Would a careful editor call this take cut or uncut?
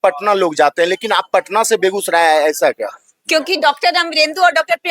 uncut